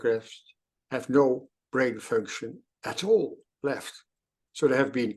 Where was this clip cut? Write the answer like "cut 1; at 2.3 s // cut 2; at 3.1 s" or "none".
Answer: none

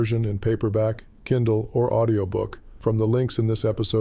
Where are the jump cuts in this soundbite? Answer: cut 1; at 2.6 s

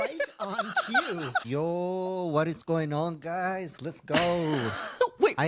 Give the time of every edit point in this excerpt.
cut 1; at 1.5 s

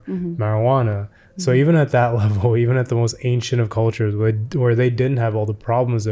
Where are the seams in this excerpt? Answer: none

